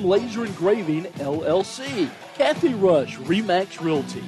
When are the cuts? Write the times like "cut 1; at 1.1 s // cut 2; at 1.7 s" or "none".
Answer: cut 1; at 2.2 s